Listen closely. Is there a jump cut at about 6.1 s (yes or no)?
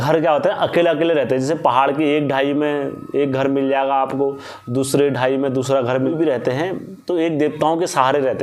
yes